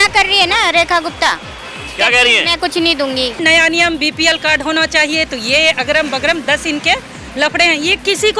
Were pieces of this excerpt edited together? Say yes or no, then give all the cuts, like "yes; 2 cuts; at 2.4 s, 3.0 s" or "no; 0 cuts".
yes; 1 cut; at 3.4 s